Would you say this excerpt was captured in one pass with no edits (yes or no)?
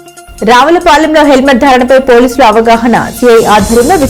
yes